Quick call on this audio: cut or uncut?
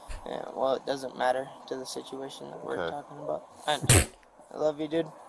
uncut